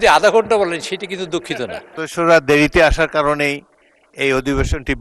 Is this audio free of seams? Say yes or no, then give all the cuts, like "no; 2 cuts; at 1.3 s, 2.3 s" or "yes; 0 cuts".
no; 1 cut; at 1.9 s